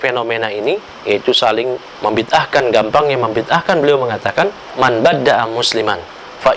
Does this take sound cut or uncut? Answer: cut